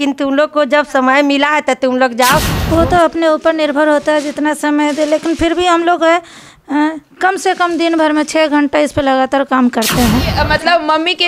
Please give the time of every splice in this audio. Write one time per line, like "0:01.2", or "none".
0:02.5
0:10.3